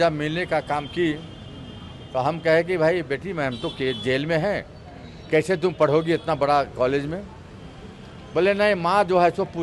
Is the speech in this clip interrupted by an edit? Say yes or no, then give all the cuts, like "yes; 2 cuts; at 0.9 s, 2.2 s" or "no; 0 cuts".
no; 0 cuts